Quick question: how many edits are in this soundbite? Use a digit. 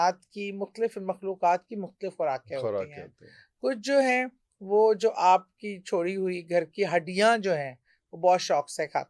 0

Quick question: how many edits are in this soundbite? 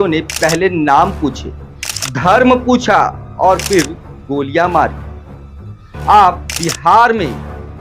1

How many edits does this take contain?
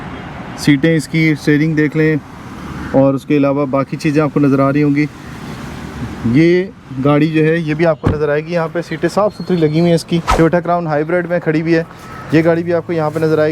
1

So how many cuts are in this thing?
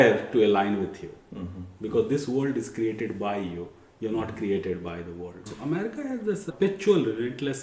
1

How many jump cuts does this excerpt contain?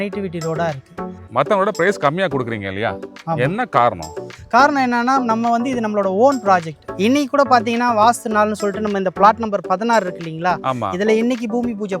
2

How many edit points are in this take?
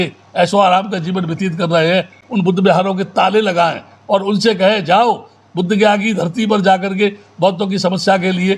0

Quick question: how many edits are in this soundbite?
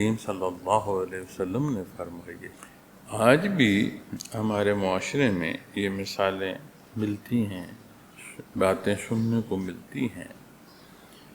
1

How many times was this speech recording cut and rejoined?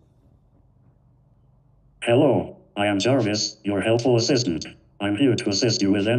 1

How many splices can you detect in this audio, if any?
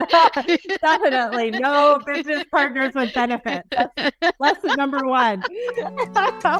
0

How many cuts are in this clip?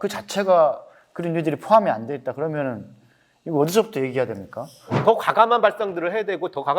1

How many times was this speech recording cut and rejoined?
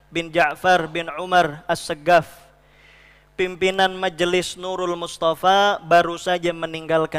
0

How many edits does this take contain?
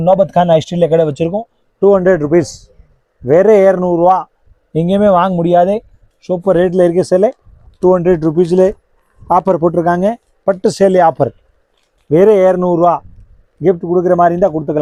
0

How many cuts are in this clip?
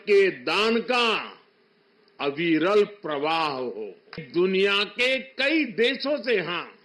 1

